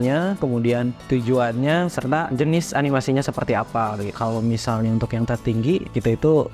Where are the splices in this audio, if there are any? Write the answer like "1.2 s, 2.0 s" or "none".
none